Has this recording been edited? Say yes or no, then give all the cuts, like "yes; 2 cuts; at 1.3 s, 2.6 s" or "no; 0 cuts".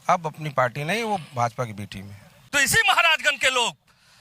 yes; 1 cut; at 2.3 s